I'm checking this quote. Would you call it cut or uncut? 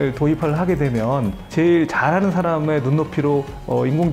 uncut